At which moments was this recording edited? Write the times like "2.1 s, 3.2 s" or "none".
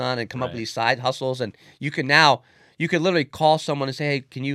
none

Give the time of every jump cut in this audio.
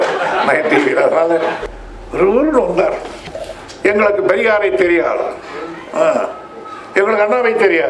1.6 s

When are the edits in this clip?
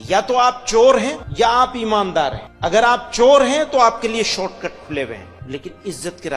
1.2 s, 2.5 s, 5.3 s

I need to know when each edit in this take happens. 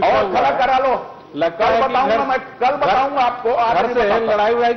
none

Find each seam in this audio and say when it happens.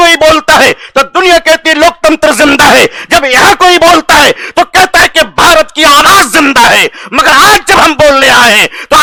none

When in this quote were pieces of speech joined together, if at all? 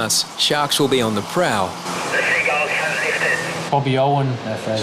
1.9 s, 3.6 s

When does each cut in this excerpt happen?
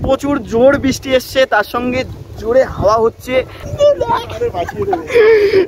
3.6 s

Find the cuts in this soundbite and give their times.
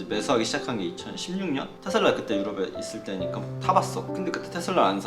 1.7 s, 4.0 s

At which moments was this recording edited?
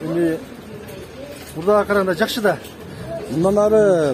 none

